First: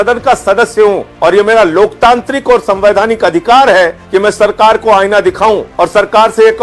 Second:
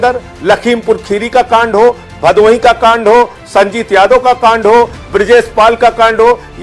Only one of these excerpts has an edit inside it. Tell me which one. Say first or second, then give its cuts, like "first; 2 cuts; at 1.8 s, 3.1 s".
first; 3 cuts; at 1.1 s, 4.0 s, 5.7 s